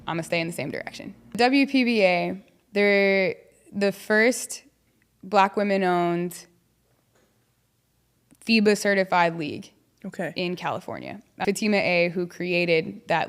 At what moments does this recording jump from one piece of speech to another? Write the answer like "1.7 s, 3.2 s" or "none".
1.4 s, 11.4 s